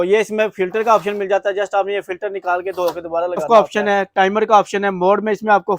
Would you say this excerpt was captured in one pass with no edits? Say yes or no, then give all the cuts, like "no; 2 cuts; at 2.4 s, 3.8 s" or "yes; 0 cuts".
no; 1 cut; at 3.4 s